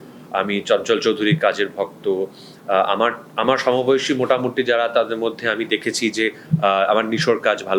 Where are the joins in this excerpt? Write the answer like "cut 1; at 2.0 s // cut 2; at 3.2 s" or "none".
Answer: none